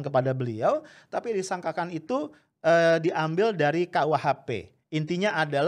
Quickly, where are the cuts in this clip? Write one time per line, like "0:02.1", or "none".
none